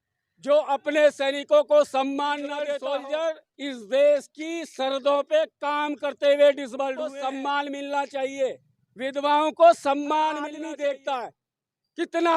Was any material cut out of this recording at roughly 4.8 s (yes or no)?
no